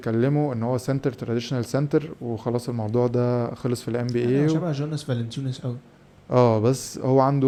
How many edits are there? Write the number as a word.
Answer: zero